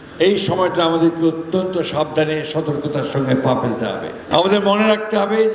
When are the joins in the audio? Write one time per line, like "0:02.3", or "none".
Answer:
0:04.2